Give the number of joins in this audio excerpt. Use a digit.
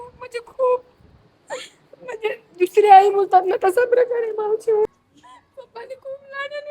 1